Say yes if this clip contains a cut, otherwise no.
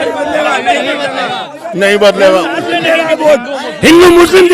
no